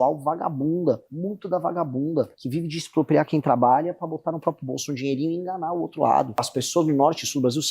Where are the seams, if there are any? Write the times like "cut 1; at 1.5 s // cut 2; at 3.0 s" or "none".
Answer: cut 1; at 1.1 s // cut 2; at 2.4 s // cut 3; at 6.6 s